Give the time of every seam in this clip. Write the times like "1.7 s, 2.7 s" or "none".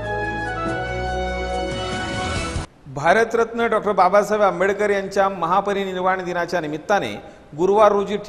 2.6 s